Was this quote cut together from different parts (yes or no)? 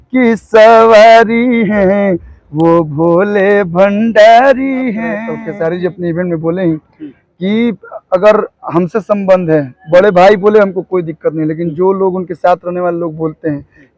yes